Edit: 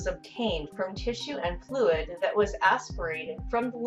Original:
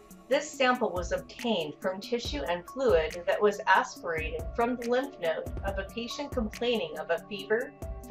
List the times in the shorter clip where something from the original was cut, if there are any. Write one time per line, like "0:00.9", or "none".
none